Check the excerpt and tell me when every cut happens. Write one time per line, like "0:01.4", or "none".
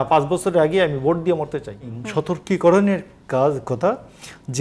0:02.0

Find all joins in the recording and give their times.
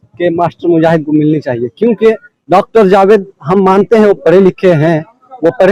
none

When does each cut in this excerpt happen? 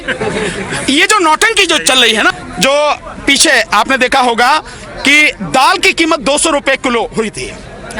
0:02.4

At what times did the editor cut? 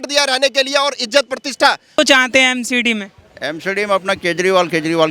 0:01.9

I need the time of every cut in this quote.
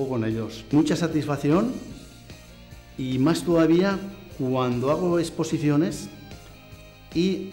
none

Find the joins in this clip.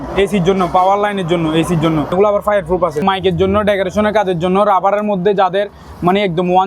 0:02.1
0:03.0

